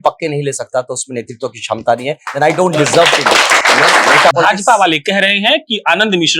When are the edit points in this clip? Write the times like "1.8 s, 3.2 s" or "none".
4.3 s